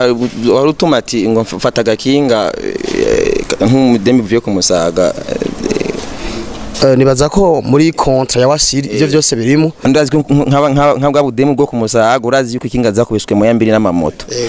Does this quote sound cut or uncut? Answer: cut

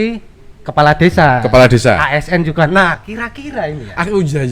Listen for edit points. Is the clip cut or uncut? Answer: cut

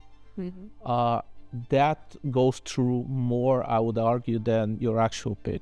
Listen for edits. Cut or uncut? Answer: uncut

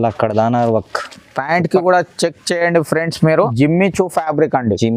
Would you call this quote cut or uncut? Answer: cut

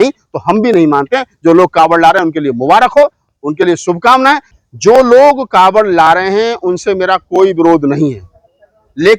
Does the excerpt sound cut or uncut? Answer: cut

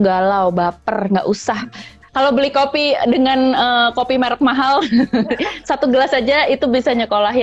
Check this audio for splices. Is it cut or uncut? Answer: cut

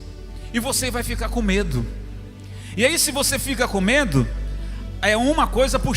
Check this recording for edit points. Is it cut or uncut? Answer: uncut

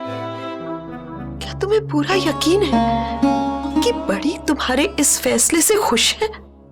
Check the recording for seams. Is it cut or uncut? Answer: cut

